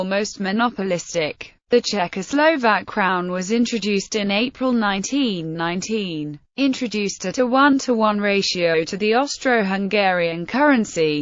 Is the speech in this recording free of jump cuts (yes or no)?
yes